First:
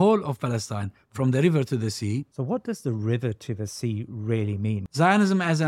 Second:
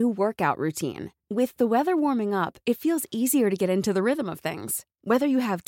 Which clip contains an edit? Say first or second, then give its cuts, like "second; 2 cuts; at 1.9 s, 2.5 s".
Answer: first; 2 cuts; at 2.3 s, 4.8 s